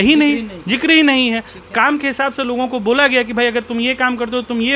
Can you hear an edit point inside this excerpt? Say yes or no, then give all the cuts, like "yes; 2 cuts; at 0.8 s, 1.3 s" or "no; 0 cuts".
no; 0 cuts